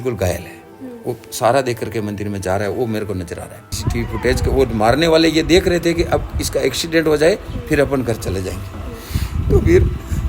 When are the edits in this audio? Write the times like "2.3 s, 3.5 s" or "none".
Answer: 3.8 s